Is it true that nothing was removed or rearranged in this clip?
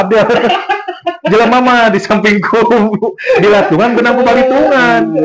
yes; 0 cuts

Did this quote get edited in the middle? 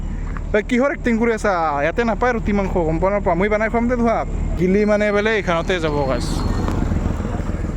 yes; 1 cut; at 4.5 s

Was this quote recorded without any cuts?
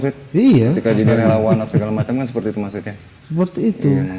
yes; 0 cuts

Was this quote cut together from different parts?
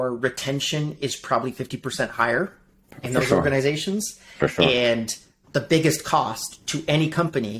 no; 0 cuts

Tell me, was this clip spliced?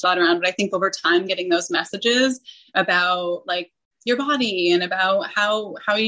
no; 0 cuts

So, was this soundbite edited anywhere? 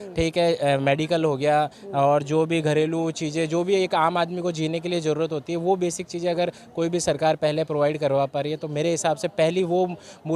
no; 0 cuts

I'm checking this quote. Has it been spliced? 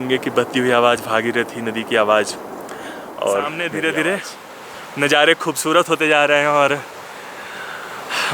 yes; 1 cut; at 3.5 s

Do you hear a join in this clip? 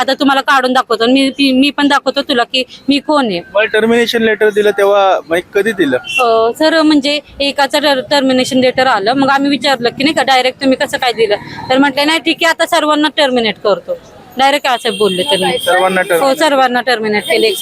no; 0 cuts

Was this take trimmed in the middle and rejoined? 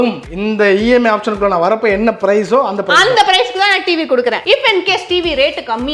yes; 1 cut; at 4.4 s

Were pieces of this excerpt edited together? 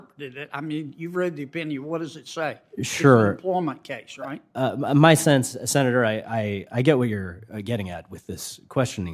no; 0 cuts

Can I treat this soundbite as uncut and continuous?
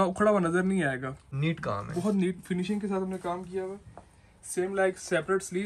yes; 0 cuts

